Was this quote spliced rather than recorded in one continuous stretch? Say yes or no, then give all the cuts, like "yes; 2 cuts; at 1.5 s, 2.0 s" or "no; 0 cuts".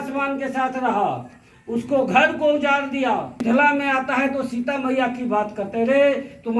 yes; 1 cut; at 3.0 s